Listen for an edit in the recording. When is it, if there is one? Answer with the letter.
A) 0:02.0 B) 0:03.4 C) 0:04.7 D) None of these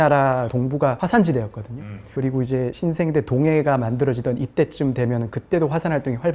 D